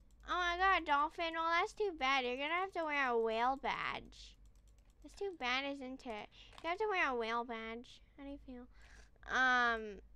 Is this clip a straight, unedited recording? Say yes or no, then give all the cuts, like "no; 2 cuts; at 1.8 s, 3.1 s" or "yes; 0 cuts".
yes; 0 cuts